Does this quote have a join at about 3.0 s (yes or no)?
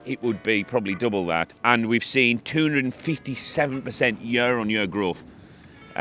no